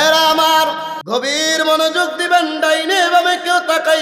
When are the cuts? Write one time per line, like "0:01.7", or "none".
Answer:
0:01.0

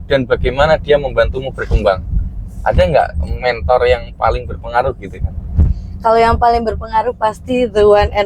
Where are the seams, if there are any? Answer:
none

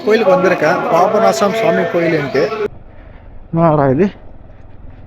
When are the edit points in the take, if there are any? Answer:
0:02.7

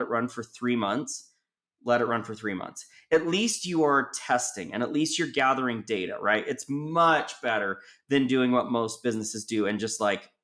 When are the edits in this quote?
none

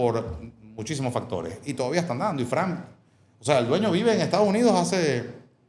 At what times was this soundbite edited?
none

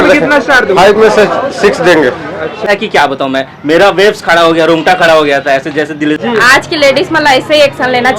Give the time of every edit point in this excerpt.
0:02.7
0:06.2

